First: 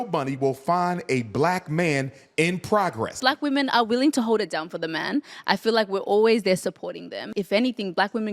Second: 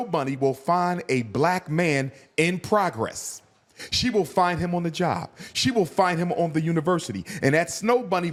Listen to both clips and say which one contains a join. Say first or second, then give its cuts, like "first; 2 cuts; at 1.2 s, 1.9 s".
first; 2 cuts; at 3.2 s, 7.3 s